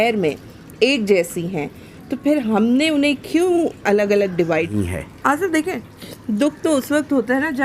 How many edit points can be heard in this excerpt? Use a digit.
1